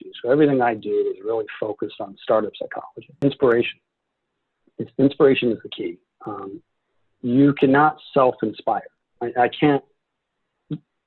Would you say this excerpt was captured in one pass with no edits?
no; 1 cut; at 3.1 s

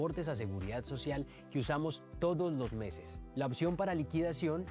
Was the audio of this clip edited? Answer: yes; 1 cut; at 1.8 s

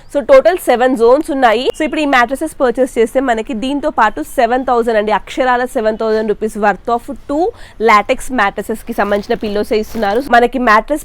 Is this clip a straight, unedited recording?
no; 2 cuts; at 1.8 s, 10.2 s

